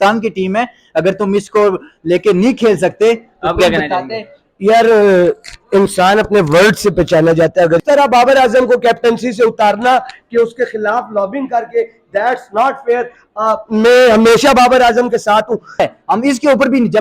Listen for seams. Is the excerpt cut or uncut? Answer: cut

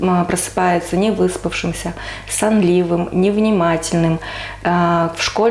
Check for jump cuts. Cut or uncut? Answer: uncut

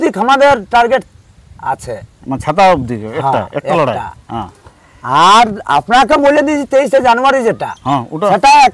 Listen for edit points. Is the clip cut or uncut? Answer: uncut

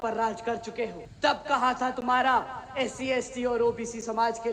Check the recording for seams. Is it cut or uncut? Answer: cut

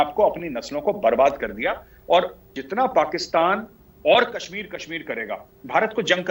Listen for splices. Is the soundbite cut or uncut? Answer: cut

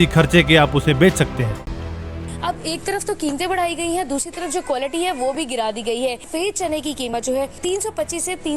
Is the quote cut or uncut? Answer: cut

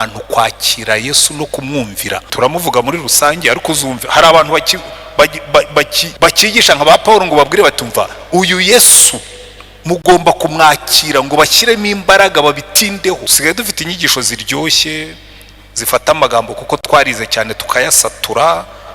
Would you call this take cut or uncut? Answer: cut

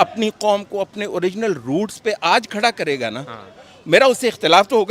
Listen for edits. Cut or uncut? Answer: uncut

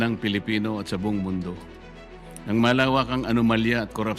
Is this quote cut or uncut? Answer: uncut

